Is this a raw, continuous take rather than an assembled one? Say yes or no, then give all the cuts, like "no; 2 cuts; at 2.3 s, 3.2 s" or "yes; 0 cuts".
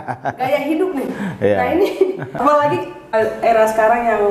no; 1 cut; at 2.4 s